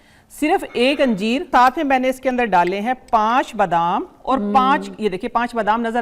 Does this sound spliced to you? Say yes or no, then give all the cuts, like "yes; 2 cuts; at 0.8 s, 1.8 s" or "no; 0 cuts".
yes; 1 cut; at 1.5 s